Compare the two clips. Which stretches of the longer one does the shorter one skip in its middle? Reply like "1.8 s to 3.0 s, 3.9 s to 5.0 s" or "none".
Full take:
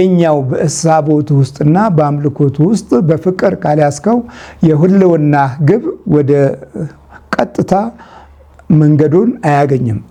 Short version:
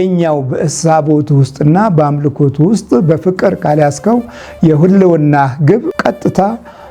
5.9 s to 7.3 s